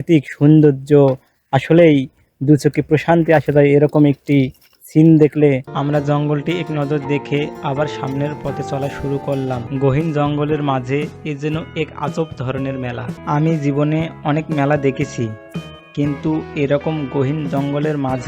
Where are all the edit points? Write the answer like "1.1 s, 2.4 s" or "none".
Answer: 5.7 s, 9.7 s, 13.2 s